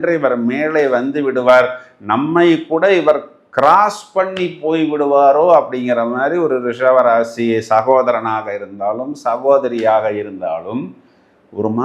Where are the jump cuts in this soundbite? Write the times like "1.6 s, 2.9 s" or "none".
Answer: none